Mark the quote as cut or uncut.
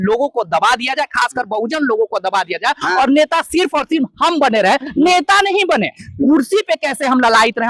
uncut